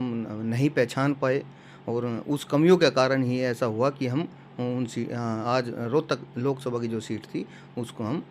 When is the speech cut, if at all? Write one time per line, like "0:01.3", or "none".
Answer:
none